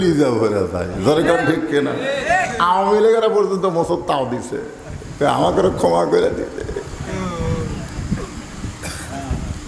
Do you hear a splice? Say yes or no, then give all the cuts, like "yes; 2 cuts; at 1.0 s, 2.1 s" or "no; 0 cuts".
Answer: no; 0 cuts